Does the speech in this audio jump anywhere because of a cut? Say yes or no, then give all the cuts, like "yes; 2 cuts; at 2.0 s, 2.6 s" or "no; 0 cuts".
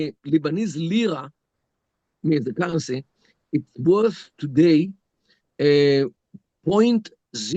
no; 0 cuts